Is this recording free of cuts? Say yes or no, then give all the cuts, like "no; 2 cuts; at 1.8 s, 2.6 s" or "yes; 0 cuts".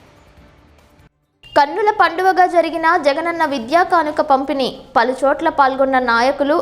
no; 1 cut; at 0.9 s